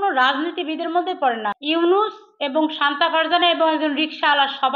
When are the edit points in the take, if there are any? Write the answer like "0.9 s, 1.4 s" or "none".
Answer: 1.6 s